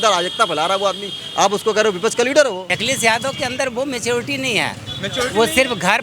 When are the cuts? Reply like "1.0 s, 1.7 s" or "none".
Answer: 2.7 s